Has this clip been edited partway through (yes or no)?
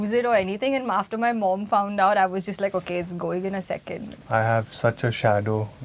yes